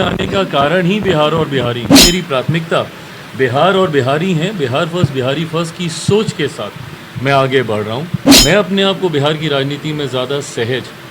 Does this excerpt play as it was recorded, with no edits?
no; 2 cuts; at 1.9 s, 8.2 s

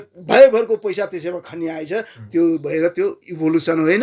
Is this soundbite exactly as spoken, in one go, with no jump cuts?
yes; 0 cuts

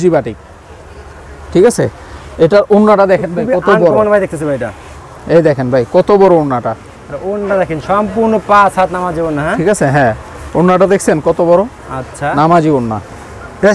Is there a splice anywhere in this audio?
no; 0 cuts

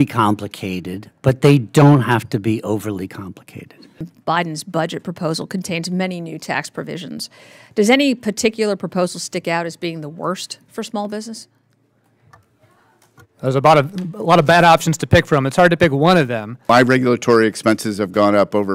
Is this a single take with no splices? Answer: no; 2 cuts; at 4.1 s, 16.6 s

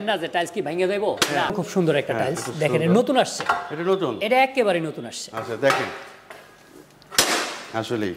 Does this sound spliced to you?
yes; 1 cut; at 1.5 s

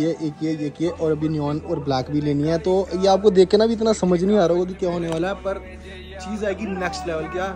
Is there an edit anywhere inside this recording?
no; 0 cuts

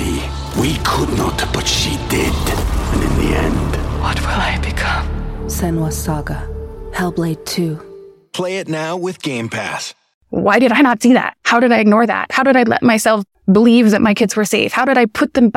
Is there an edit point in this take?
yes; 3 cuts; at 10.2 s, 11.4 s, 13.3 s

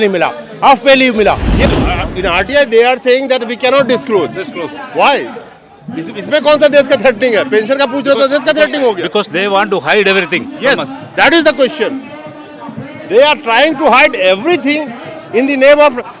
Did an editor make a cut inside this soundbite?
yes; 1 cut; at 1.5 s

